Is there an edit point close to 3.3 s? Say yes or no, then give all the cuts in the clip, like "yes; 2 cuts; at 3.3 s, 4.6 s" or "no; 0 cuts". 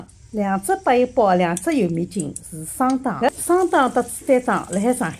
yes; 1 cut; at 3.3 s